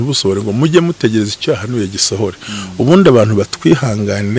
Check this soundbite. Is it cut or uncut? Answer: uncut